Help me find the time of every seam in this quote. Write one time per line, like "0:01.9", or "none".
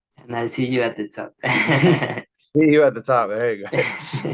none